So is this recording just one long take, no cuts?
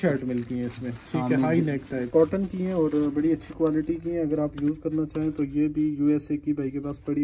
no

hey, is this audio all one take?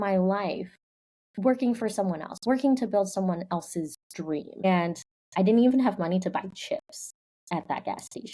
no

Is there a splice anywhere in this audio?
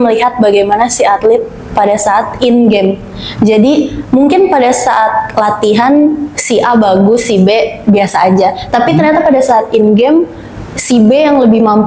no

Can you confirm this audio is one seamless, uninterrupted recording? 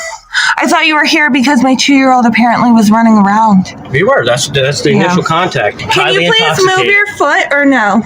no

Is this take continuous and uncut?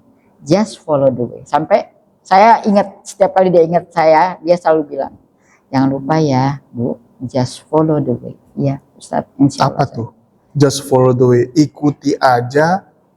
yes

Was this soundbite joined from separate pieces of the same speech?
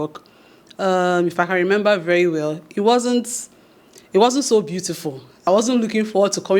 yes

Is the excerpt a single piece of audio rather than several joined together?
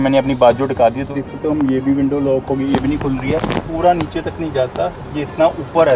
no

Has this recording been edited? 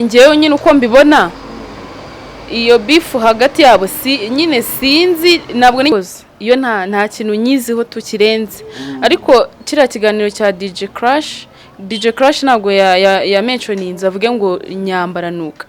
yes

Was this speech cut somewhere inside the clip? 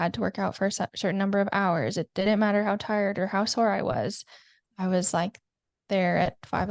no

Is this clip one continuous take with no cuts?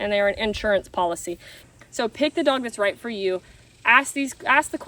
no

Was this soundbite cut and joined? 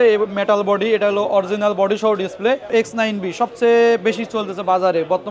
yes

